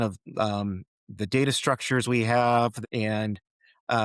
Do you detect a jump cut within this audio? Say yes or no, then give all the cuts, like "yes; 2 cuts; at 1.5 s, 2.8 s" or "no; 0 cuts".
yes; 1 cut; at 2.8 s